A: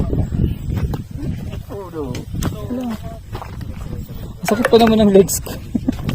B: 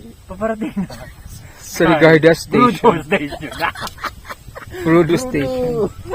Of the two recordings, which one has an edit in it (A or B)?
A